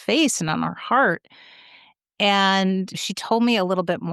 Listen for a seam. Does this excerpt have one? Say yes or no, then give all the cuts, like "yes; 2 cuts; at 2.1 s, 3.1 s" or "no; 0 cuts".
yes; 1 cut; at 3.0 s